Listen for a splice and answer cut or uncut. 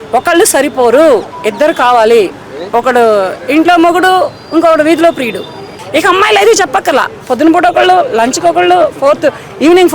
cut